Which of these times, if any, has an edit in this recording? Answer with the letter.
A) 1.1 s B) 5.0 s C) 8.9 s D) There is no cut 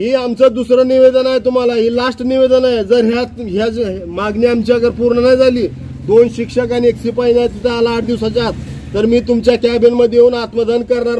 D